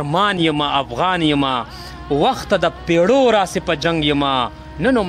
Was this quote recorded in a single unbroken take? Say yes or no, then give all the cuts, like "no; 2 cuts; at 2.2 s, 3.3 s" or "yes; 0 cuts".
yes; 0 cuts